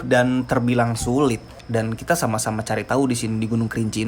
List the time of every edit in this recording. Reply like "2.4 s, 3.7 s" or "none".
1.6 s